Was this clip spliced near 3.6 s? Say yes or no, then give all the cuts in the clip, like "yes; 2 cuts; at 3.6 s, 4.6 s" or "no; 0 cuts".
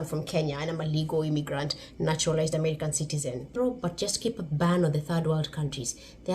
yes; 1 cut; at 3.6 s